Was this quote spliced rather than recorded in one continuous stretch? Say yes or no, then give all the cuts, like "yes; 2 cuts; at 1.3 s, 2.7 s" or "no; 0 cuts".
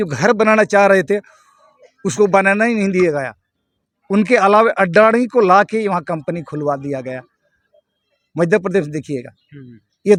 no; 0 cuts